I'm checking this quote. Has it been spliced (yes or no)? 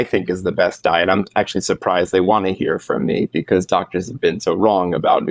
no